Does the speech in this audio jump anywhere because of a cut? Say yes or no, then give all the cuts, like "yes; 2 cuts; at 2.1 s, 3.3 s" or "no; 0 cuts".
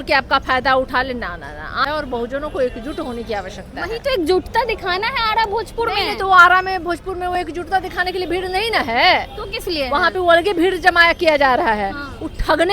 yes; 1 cut; at 1.8 s